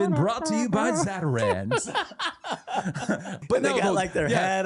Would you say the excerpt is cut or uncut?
cut